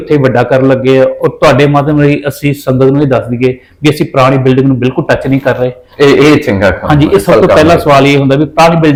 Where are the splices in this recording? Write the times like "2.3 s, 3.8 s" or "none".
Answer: none